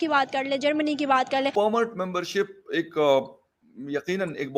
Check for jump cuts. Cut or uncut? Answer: cut